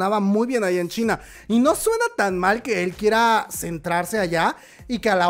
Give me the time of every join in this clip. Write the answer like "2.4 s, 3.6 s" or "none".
none